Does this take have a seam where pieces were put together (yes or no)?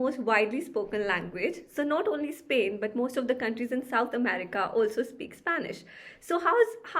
no